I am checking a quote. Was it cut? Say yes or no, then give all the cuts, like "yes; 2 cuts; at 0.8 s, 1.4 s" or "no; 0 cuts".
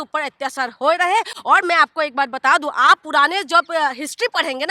no; 0 cuts